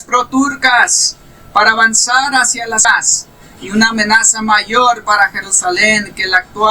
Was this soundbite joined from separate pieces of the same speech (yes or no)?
yes